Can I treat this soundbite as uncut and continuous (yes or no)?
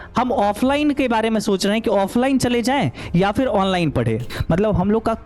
no